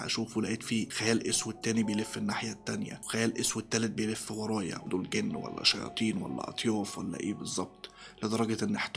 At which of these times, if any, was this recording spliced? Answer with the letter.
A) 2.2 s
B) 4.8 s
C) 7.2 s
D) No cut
B